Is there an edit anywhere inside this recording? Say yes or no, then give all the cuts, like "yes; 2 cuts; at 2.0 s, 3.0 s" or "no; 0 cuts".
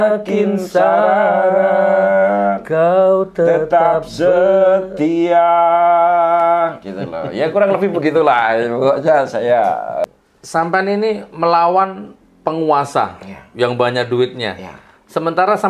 yes; 1 cut; at 10.0 s